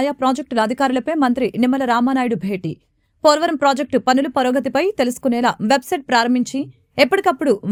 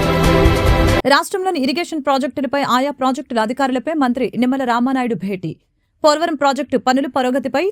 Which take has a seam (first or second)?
second